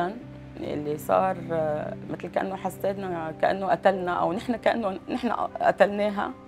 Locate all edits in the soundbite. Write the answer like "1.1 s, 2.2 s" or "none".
none